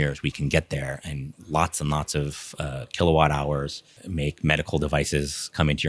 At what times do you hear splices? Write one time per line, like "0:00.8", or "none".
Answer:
0:01.3
0:03.9